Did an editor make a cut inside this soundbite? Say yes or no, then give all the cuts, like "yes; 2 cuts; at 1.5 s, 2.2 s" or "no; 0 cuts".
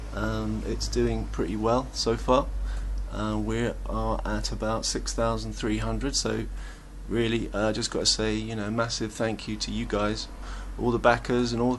yes; 1 cut; at 2.0 s